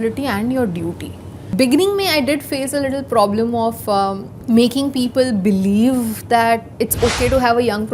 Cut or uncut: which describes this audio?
cut